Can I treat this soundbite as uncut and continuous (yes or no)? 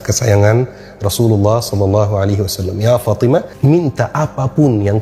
no